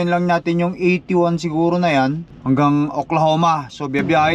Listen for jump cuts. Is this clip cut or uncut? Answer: cut